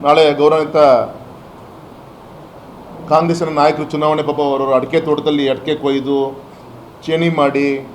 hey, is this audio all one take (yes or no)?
yes